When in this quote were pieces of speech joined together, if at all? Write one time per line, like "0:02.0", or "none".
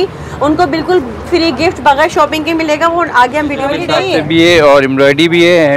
0:03.8